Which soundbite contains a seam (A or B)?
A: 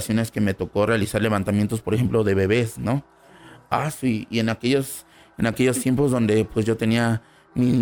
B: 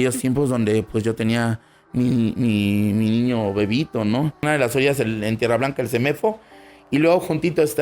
B